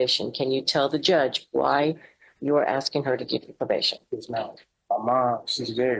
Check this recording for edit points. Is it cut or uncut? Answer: cut